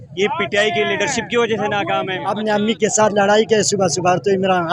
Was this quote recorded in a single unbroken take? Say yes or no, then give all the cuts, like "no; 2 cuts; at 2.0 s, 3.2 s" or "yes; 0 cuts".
no; 1 cut; at 2.2 s